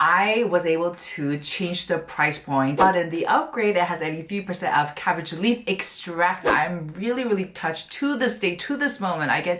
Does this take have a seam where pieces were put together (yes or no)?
yes